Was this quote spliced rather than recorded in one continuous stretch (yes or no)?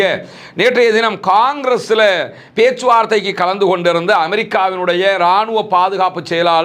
no